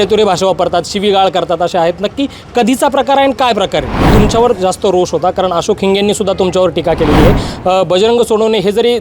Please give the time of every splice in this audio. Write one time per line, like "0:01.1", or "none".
0:04.1

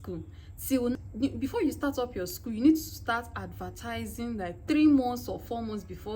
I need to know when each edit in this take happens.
0:00.9

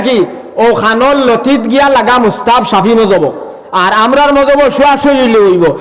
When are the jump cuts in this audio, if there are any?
none

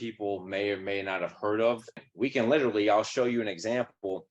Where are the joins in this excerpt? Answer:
0:02.0

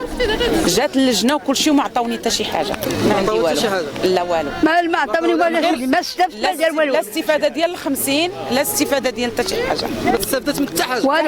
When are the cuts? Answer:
none

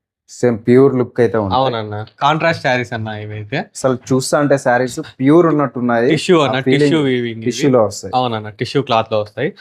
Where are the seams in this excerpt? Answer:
0:02.1

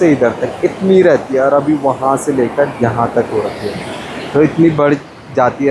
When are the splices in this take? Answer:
none

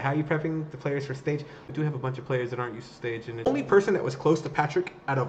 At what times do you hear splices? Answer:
0:01.2
0:03.5

